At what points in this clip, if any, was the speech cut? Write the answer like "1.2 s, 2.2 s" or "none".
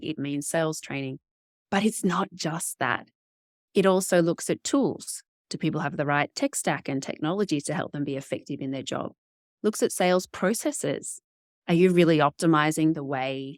none